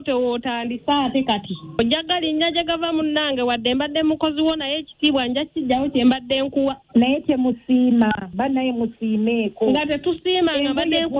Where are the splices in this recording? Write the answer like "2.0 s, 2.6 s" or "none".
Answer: none